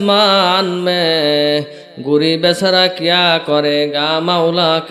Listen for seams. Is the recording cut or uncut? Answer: uncut